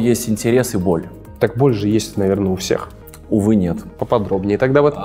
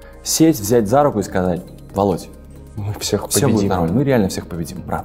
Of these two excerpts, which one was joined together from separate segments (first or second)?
first